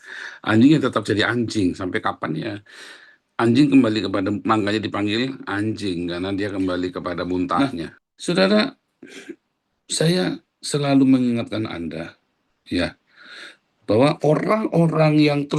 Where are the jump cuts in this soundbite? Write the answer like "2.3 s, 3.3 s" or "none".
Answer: 7.6 s

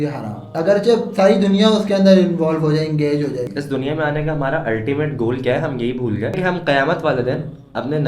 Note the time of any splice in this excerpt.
3.5 s, 6.4 s

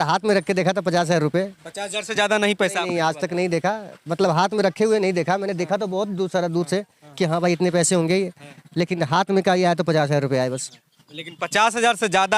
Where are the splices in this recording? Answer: none

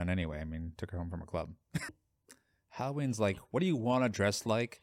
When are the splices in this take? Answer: 1.9 s

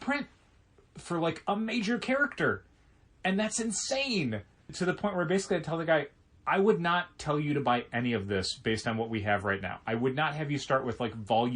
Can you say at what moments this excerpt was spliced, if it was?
4.7 s

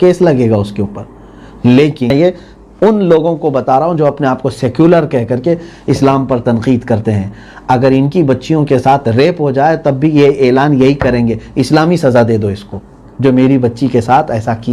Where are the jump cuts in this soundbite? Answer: 2.1 s

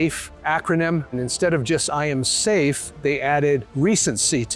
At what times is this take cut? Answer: 1.1 s

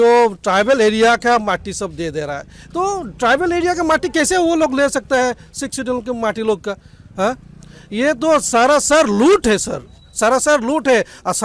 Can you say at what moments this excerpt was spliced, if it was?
none

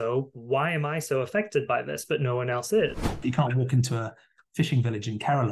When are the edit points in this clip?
3.0 s

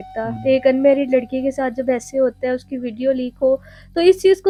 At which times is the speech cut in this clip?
none

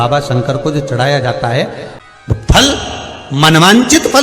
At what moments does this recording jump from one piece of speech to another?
1.9 s

